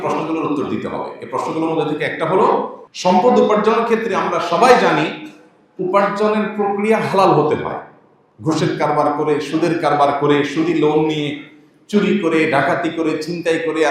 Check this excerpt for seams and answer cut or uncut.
cut